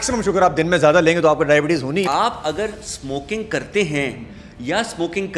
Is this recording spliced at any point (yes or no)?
yes